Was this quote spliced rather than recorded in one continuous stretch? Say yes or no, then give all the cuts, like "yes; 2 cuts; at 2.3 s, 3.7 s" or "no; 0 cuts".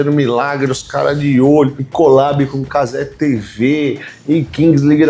yes; 1 cut; at 1.8 s